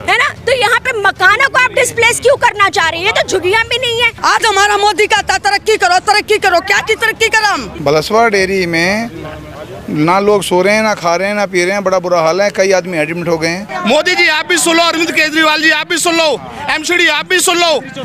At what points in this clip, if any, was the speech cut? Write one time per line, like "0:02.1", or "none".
0:04.1
0:07.8
0:13.7